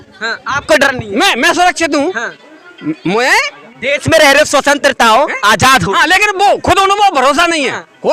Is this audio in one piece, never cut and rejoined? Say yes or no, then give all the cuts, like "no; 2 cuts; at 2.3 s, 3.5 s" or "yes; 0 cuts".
yes; 0 cuts